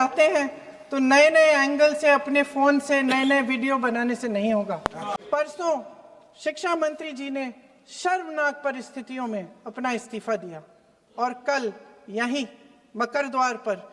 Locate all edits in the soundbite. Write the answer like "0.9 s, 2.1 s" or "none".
5.1 s